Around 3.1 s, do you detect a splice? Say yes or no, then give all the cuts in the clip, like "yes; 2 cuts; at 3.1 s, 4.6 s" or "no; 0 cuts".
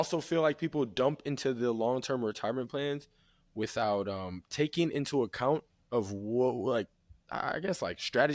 no; 0 cuts